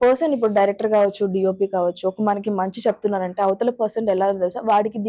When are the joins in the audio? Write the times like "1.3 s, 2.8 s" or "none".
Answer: none